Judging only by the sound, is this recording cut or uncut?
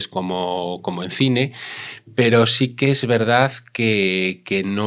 uncut